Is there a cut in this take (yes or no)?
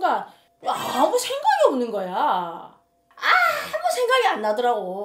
no